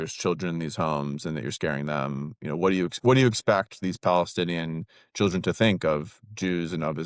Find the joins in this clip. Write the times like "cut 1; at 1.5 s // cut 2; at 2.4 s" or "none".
none